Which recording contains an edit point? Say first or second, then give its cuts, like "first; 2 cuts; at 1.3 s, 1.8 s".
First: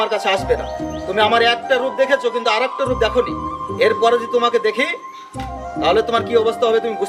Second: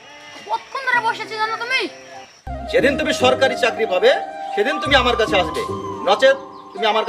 second; 1 cut; at 2.5 s